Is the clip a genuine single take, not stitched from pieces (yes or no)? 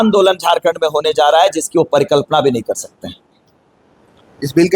yes